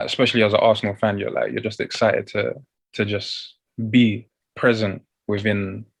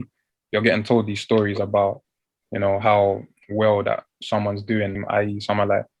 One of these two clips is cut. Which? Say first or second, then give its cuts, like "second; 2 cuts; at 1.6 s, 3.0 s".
second; 1 cut; at 5.0 s